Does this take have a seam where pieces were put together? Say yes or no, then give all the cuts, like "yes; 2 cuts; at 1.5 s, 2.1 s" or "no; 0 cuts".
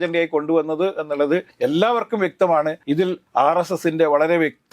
yes; 2 cuts; at 1.5 s, 3.0 s